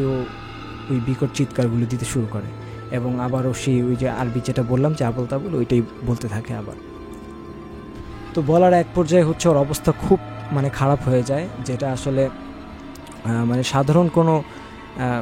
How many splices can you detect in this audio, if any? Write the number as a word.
zero